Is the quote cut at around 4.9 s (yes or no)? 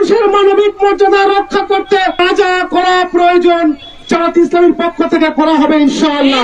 no